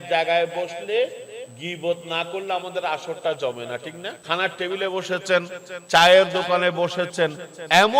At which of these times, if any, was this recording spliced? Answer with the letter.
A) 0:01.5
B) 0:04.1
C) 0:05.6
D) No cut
B